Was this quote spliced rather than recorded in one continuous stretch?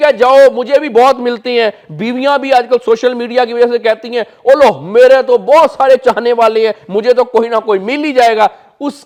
no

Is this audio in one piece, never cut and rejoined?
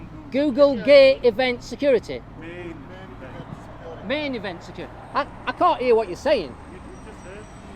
yes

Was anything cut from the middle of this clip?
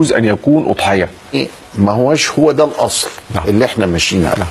yes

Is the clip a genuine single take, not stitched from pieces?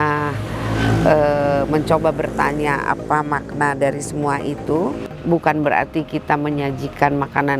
no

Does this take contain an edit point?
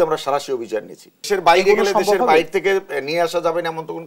yes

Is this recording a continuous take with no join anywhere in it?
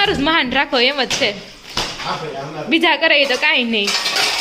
yes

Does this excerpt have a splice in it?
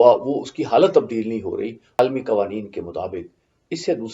yes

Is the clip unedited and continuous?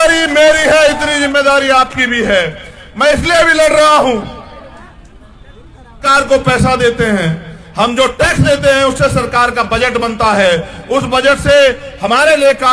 no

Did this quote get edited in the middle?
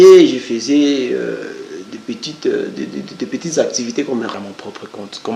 yes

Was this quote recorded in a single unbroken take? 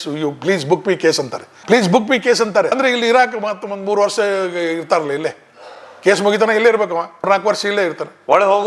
yes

